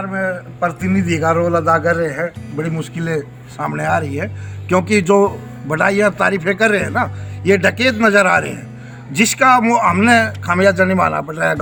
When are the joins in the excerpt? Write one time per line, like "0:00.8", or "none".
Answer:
none

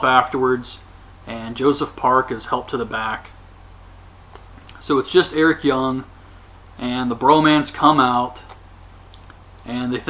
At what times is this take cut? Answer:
0:02.9

